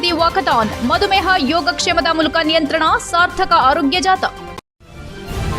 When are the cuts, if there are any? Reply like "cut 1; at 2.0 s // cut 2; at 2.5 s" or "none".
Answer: cut 1; at 4.5 s